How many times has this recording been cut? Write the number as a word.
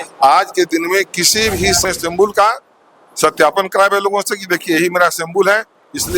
one